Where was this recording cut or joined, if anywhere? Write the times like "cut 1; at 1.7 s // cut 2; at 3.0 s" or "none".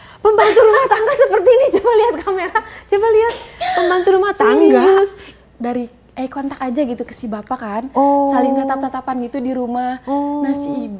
cut 1; at 5.4 s